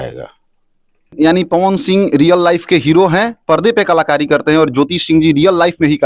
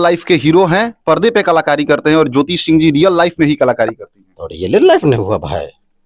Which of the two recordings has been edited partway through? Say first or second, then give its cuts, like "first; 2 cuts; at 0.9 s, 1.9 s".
first; 1 cut; at 1.1 s